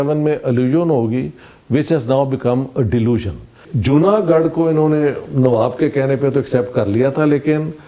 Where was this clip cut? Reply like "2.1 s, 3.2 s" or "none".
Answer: 3.7 s